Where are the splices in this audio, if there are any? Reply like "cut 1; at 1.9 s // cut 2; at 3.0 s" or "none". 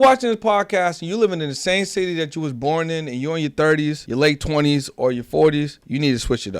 cut 1; at 4.0 s // cut 2; at 5.8 s